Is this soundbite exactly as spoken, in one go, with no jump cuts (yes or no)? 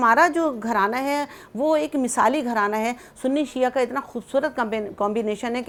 yes